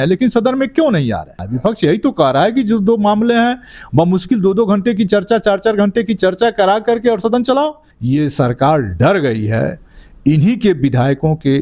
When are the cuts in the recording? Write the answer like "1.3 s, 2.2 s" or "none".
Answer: 1.4 s, 7.9 s